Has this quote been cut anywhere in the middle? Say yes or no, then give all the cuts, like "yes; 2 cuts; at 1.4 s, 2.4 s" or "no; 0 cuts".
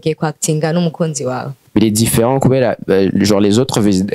yes; 1 cut; at 1.5 s